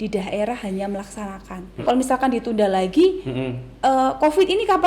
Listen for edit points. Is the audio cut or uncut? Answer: cut